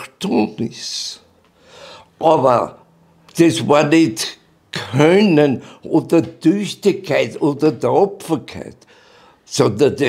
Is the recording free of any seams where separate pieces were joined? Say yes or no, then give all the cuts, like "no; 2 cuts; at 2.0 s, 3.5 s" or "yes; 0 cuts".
no; 1 cut; at 3.2 s